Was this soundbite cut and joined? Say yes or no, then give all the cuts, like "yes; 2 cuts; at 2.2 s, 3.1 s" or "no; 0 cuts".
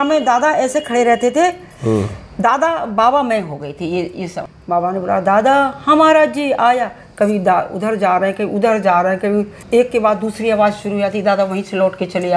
yes; 2 cuts; at 4.4 s, 9.6 s